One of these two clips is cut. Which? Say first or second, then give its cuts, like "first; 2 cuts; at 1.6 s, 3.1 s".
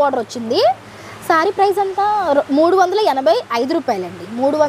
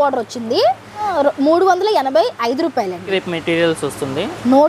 second; 2 cuts; at 1.0 s, 3.1 s